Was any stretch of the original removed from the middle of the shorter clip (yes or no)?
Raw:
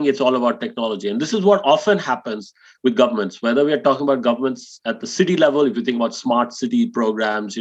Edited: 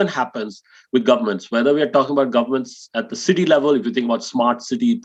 no